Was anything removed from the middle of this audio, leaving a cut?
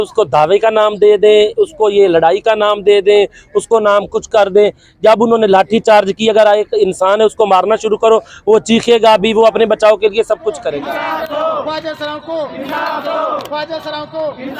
yes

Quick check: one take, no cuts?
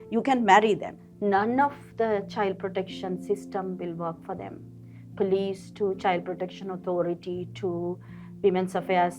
no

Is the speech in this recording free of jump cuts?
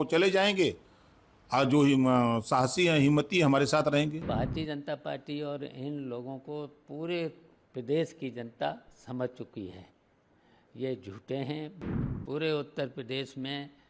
no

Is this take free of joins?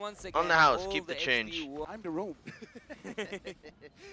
no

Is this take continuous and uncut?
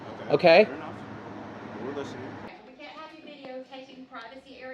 no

